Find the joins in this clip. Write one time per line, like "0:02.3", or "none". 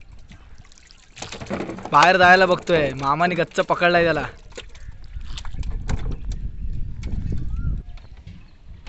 0:07.8